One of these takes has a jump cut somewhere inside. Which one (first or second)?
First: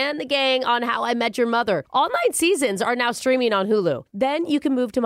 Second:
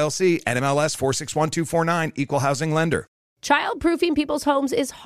second